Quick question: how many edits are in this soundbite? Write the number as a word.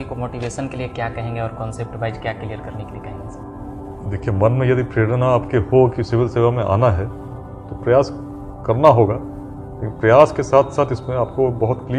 zero